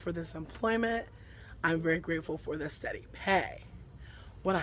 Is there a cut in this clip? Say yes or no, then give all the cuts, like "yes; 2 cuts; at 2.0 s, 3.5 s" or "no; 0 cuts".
yes; 1 cut; at 3.2 s